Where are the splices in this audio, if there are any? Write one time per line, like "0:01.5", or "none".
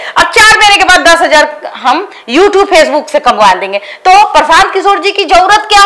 none